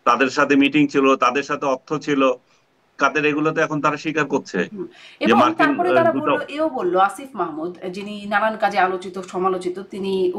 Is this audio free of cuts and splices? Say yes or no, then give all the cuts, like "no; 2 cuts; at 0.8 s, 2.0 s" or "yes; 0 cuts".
yes; 0 cuts